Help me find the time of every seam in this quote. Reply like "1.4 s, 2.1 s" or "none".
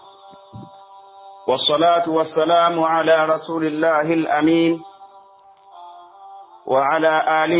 1.5 s